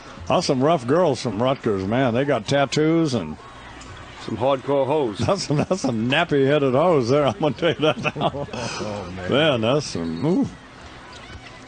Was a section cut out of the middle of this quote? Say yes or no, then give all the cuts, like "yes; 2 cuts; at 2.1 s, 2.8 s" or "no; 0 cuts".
no; 0 cuts